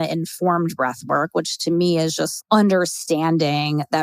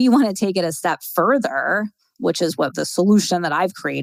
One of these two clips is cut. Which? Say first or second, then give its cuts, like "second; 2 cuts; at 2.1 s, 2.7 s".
first; 1 cut; at 2.4 s